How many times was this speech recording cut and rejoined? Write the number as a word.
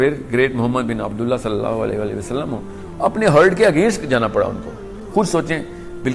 one